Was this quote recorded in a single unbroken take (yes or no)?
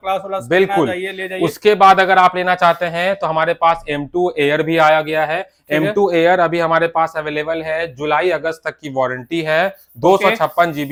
yes